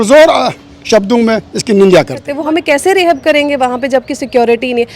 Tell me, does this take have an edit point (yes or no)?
yes